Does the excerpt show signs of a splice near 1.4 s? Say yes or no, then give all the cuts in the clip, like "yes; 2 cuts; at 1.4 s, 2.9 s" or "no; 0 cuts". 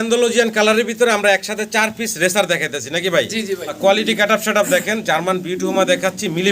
no; 1 cut; at 3.6 s